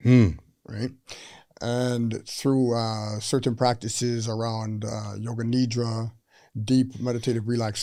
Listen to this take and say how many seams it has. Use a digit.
0